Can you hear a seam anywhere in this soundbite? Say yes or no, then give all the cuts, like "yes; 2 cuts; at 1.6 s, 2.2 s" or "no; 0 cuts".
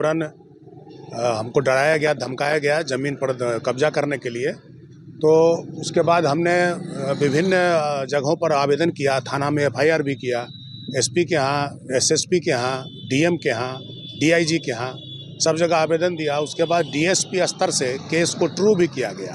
no; 0 cuts